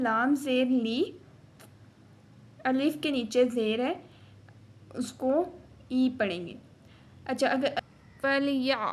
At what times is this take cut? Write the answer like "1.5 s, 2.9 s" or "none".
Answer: 7.8 s